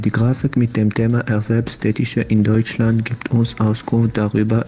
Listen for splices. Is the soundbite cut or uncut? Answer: uncut